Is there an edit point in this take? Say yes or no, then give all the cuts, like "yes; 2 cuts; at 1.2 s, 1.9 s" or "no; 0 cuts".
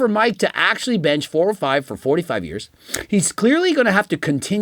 no; 0 cuts